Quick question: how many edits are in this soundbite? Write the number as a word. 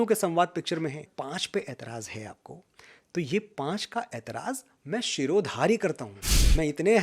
one